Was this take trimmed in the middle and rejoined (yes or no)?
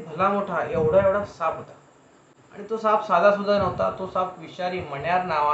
no